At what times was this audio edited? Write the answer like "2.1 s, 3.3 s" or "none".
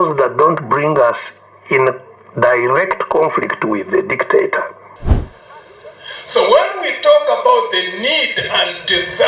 5.0 s